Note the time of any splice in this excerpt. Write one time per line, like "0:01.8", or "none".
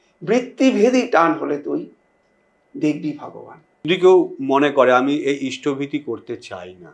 0:03.9